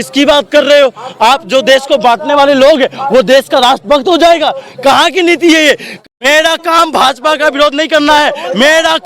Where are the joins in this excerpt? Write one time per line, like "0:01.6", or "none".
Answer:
0:06.1